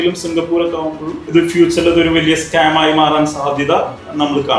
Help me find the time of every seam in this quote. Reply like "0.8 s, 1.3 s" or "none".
1.1 s